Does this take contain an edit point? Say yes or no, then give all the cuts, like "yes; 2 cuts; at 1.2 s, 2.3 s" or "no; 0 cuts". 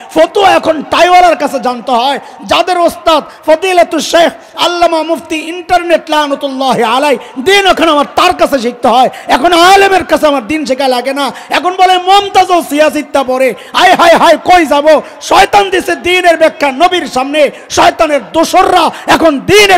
no; 0 cuts